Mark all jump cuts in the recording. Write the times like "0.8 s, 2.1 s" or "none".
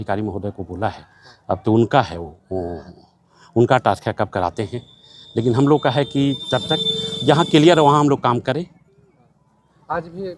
none